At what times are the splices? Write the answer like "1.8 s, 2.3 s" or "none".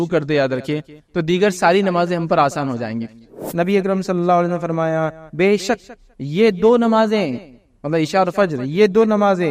3.4 s